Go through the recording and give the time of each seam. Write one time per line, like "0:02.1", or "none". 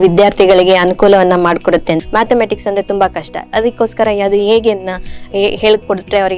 0:02.0